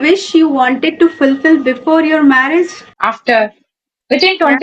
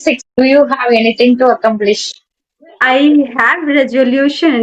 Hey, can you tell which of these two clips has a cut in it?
first; 1 cut; at 2.9 s

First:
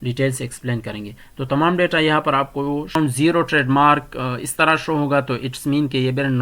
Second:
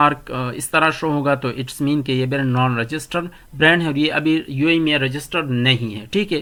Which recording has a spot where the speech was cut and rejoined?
first; 1 cut; at 3.0 s

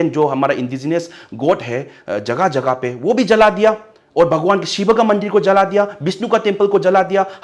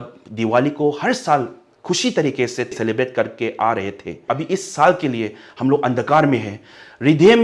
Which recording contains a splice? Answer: second; 2 cuts; at 2.7 s, 4.2 s

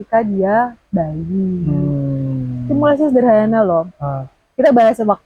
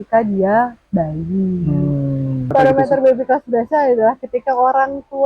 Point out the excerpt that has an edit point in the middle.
second; 1 cut; at 2.5 s

